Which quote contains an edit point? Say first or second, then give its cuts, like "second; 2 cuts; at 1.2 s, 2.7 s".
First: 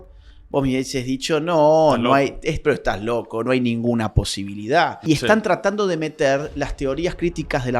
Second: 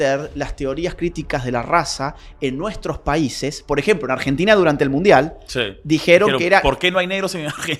first; 1 cut; at 5.0 s